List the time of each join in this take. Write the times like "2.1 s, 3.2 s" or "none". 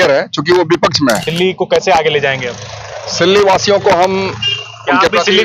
1.3 s